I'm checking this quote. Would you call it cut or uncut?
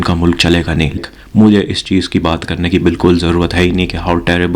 cut